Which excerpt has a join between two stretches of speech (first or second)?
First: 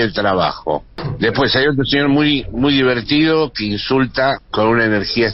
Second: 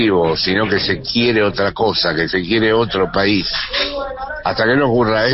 first